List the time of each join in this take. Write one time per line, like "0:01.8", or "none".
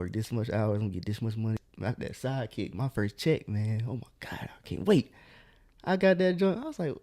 0:01.6